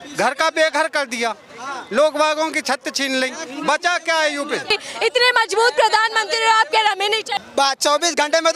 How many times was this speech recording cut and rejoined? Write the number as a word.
one